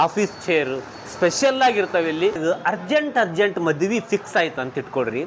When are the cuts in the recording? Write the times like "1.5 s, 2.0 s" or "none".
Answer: 2.4 s